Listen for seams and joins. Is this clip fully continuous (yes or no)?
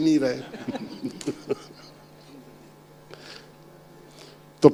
yes